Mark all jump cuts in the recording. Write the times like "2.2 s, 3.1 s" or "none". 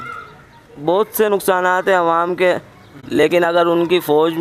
none